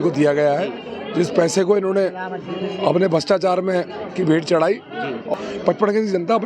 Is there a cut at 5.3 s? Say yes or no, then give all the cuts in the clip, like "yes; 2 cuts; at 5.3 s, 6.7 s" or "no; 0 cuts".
yes; 1 cut; at 5.3 s